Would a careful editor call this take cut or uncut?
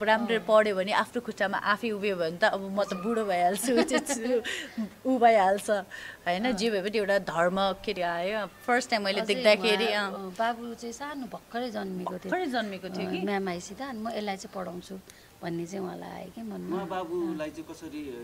uncut